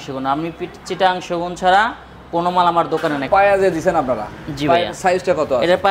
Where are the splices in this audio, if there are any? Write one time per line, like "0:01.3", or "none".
0:03.3